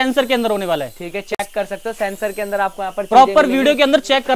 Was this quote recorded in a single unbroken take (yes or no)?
yes